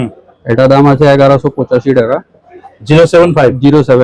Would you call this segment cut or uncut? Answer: uncut